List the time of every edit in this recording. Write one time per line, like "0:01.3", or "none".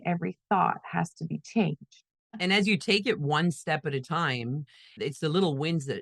0:02.4

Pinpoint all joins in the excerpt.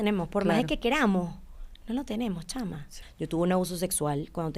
0:02.9

